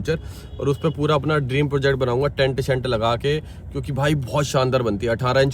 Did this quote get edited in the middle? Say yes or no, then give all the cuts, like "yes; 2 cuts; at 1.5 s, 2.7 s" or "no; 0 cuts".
no; 0 cuts